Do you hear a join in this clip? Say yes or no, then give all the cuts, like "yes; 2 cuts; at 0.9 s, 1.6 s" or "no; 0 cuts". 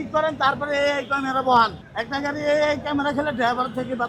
yes; 1 cut; at 1.9 s